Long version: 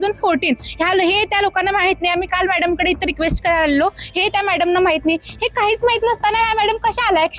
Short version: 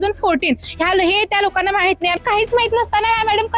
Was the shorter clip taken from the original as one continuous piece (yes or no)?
no